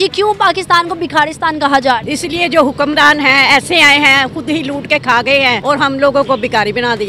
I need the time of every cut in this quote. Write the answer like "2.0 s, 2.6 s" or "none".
2.0 s, 5.6 s